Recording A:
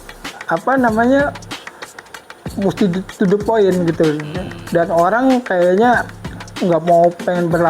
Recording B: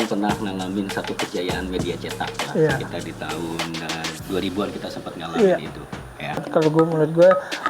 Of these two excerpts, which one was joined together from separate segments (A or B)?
B